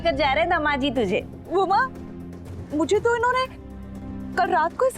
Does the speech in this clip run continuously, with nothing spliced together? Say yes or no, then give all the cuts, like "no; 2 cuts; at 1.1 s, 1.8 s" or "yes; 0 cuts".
no; 1 cut; at 1.4 s